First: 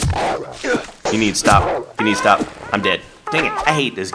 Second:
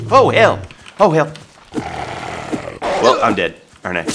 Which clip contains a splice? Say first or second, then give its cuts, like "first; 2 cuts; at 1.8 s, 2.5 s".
first; 1 cut; at 1.1 s